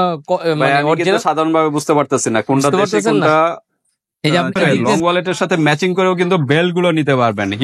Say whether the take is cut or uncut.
cut